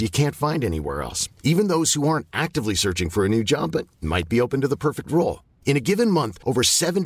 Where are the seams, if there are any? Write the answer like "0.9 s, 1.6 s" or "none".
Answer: none